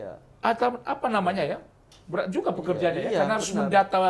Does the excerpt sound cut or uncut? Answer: uncut